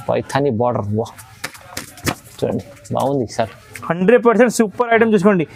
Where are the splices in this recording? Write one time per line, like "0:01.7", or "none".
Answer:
none